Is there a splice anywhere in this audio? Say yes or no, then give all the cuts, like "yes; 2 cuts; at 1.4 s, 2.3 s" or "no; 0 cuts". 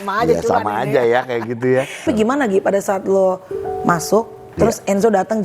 yes; 1 cut; at 2.0 s